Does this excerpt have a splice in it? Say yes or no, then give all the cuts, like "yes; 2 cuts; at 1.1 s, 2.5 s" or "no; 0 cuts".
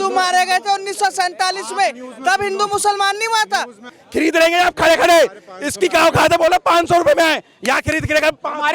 yes; 1 cut; at 4.0 s